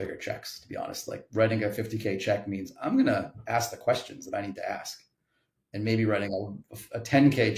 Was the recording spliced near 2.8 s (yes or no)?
no